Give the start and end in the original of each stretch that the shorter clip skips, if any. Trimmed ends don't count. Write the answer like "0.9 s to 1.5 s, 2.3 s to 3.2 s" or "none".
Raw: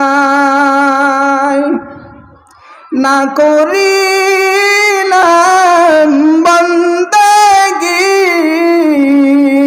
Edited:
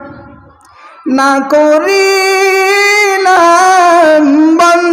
none